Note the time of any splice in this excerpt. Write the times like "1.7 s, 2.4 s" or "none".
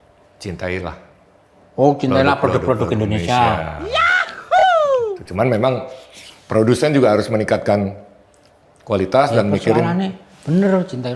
none